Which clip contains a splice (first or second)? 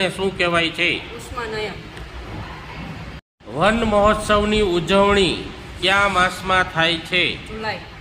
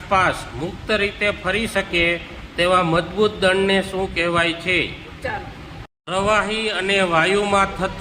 first